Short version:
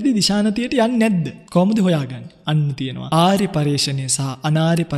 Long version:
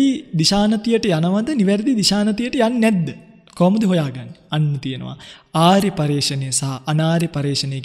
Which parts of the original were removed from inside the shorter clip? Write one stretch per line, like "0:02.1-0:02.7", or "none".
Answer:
0:03.2-0:03.4
0:05.0-0:05.4